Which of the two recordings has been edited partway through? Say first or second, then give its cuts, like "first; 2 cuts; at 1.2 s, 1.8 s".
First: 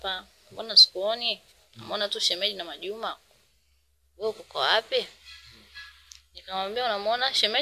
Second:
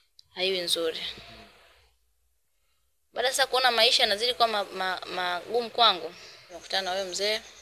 second; 1 cut; at 6.6 s